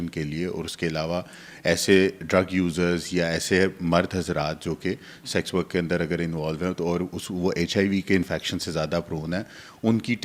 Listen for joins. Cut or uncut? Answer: uncut